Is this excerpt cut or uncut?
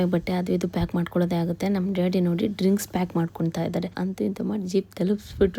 cut